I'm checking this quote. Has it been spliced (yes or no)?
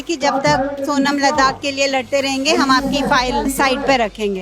yes